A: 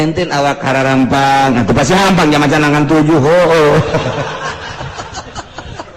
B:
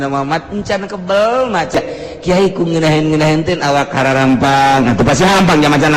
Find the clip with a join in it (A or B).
B